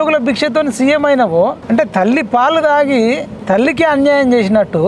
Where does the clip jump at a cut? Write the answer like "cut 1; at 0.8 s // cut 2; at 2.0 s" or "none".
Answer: cut 1; at 1.6 s // cut 2; at 3.3 s

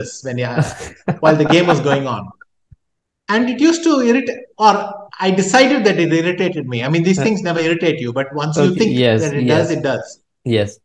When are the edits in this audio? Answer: none

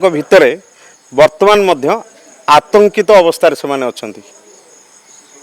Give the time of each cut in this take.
none

